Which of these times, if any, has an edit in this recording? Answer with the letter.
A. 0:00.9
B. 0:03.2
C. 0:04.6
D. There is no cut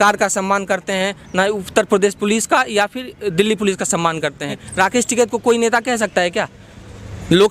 C